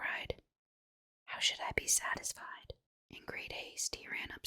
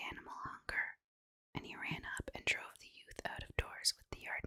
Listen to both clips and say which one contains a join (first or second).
first